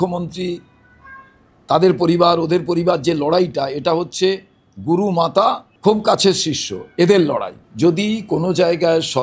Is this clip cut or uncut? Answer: cut